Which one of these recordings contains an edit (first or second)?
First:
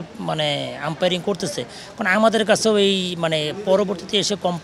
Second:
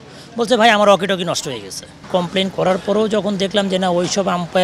second